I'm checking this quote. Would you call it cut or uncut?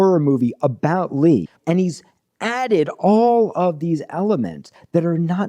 cut